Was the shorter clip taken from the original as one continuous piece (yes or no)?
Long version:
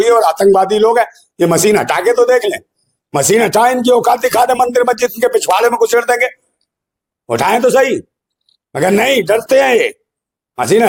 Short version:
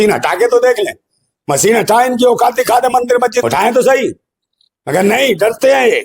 no